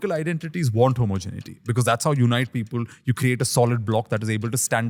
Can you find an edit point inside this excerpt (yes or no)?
no